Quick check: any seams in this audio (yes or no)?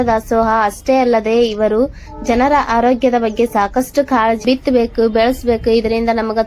yes